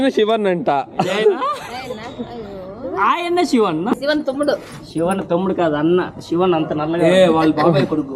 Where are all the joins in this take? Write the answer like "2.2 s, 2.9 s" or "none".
4.0 s